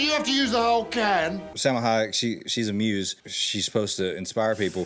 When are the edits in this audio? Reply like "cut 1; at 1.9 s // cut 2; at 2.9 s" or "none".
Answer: cut 1; at 1.5 s // cut 2; at 3.2 s